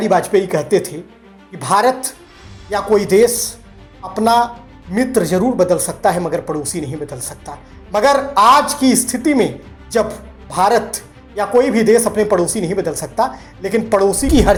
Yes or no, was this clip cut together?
no